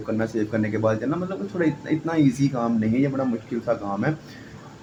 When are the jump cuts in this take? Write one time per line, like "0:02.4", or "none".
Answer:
none